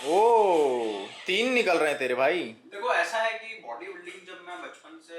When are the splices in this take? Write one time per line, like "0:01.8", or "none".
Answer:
none